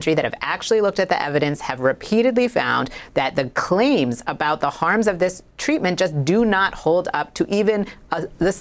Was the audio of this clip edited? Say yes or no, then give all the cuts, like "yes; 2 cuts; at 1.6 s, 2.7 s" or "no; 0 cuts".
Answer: no; 0 cuts